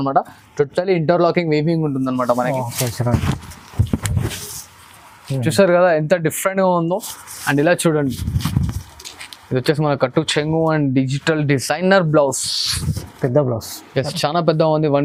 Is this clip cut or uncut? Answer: uncut